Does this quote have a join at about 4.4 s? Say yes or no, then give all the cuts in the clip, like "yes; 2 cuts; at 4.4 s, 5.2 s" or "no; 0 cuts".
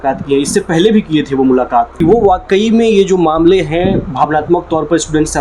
no; 1 cut; at 1.9 s